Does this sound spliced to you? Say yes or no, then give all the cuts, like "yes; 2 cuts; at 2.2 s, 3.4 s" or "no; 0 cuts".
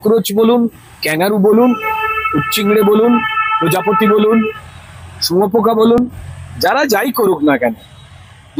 no; 0 cuts